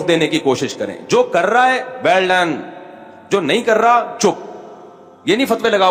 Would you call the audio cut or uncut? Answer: uncut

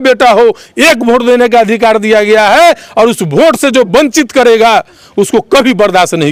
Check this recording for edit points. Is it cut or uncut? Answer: uncut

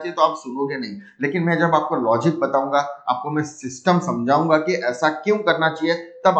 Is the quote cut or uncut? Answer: uncut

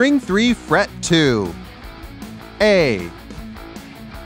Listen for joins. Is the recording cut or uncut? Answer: cut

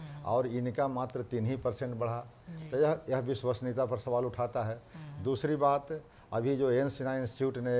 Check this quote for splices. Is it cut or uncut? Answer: uncut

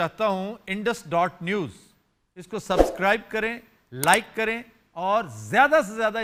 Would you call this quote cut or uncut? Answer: uncut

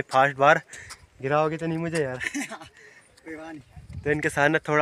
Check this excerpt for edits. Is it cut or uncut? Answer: uncut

